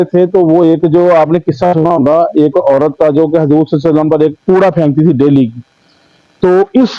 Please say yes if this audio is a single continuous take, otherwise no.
yes